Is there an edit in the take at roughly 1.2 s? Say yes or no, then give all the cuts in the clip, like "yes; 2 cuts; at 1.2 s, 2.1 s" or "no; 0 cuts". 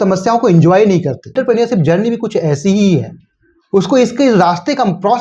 yes; 1 cut; at 1.2 s